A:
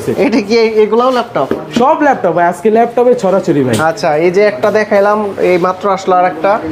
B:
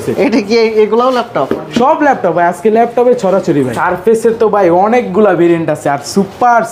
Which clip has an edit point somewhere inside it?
B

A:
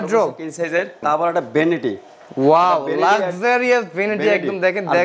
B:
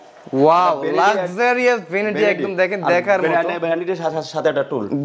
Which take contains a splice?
A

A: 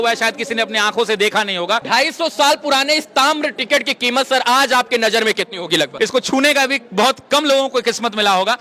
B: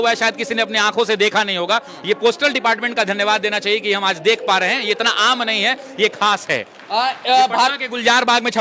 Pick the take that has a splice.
A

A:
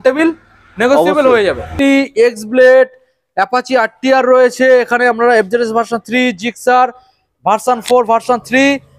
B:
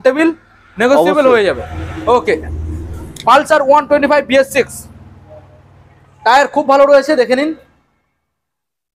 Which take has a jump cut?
A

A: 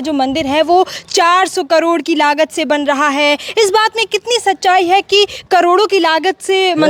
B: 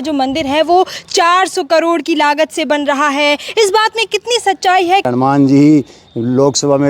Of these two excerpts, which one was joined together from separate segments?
B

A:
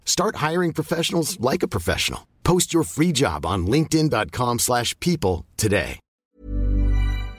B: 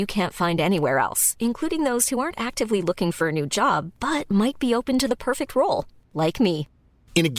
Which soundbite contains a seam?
A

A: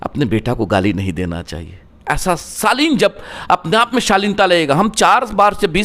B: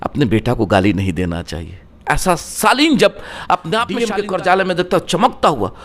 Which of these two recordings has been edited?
B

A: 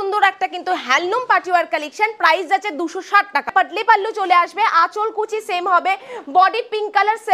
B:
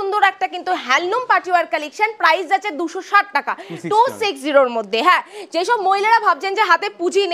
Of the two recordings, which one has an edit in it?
A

